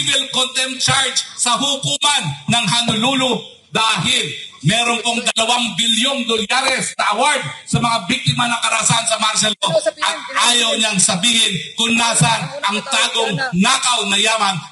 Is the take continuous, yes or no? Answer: yes